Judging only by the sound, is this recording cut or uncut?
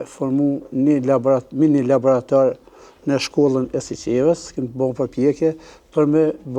uncut